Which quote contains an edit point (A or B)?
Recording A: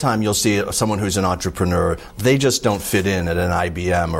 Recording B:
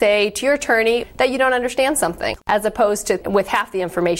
B